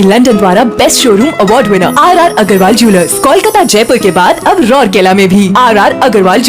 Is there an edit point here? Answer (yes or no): no